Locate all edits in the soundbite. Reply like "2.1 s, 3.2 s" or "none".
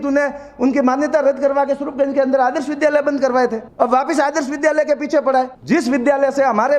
3.6 s, 5.6 s